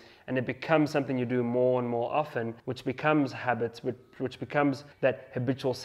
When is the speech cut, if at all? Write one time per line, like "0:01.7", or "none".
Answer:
0:02.6
0:04.9

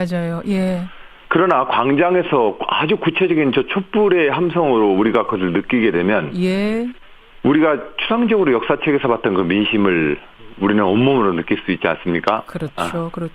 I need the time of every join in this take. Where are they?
0:03.3

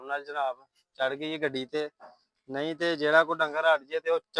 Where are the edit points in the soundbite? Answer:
none

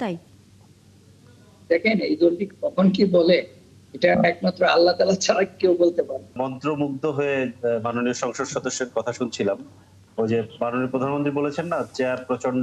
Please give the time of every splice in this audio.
0:06.4

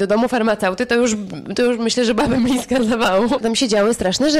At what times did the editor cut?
0:03.4

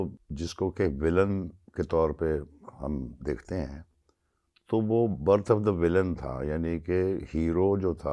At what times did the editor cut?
none

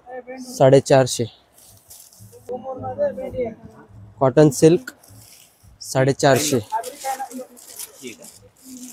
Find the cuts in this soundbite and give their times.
none

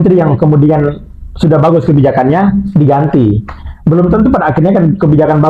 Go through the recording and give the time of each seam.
none

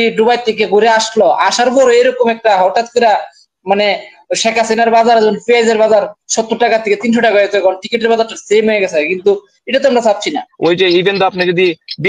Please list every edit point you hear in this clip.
0:10.5

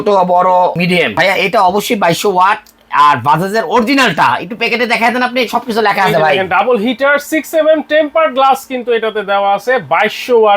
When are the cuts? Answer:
0:01.2

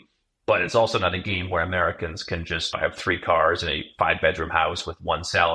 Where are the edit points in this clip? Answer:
0:02.7

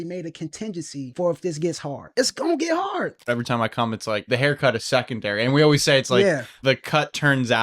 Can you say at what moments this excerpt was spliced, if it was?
0:01.1
0:02.0
0:03.3
0:04.3
0:06.6

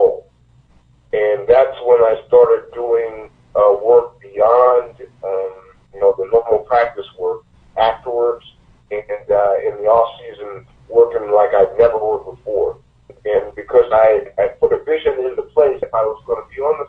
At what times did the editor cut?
0:13.1
0:14.3
0:15.8

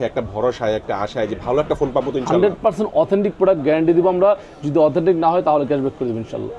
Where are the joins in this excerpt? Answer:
none

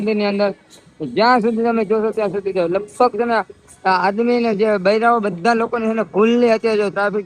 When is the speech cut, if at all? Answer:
none

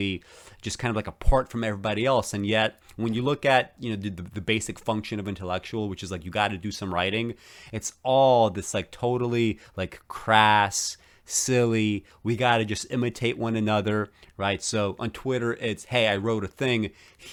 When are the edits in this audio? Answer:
none

